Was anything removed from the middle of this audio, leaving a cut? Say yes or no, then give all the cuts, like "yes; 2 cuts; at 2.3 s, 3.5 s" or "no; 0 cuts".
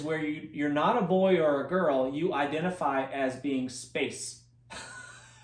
no; 0 cuts